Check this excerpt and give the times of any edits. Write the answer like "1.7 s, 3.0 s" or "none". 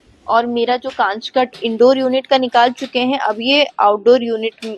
1.6 s